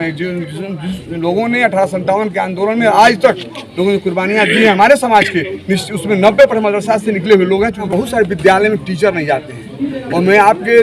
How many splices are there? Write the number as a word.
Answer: one